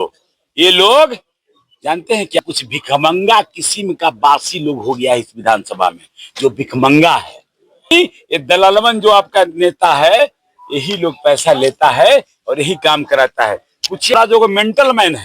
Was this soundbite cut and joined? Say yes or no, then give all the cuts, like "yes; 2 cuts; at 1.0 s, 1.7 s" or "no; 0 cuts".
yes; 3 cuts; at 2.4 s, 7.9 s, 14.1 s